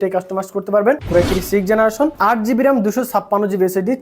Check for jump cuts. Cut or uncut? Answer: cut